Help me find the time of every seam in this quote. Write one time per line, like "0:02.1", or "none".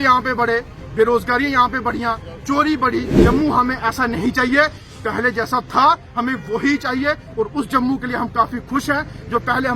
0:03.2